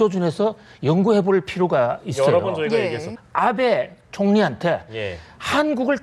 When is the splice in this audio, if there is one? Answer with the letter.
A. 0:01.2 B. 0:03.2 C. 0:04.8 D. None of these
B